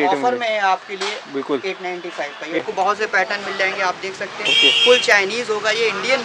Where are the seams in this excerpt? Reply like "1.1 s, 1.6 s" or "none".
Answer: 2.6 s